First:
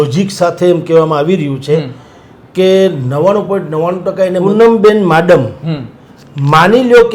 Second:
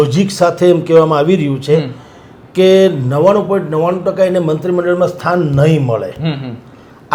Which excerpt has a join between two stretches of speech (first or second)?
first